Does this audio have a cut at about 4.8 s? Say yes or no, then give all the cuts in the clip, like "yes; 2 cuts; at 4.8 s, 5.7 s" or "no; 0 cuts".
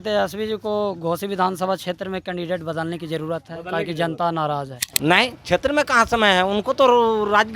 yes; 1 cut; at 4.8 s